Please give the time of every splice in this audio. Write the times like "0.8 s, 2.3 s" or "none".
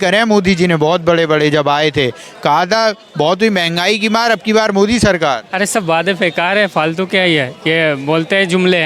none

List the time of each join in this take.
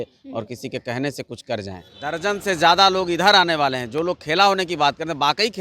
2.2 s

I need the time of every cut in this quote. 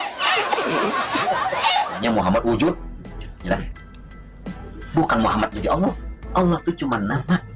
2.0 s, 3.7 s

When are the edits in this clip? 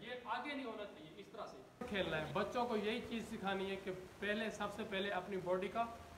1.8 s

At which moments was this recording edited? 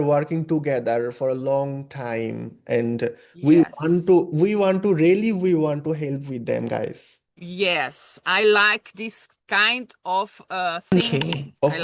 10.8 s

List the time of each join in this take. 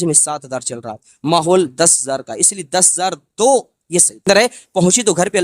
4.3 s

